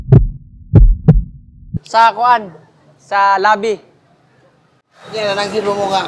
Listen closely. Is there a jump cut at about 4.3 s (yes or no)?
no